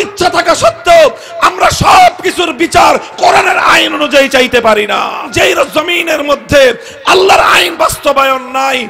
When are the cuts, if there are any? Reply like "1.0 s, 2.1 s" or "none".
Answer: 5.3 s